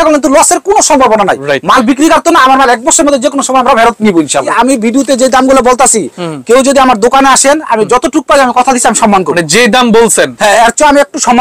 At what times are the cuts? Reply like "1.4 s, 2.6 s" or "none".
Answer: 4.5 s